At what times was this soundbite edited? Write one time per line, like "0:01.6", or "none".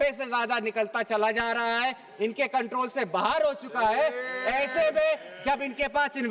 none